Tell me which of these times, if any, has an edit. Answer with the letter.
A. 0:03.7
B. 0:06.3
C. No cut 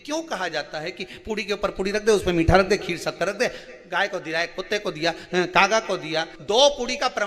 B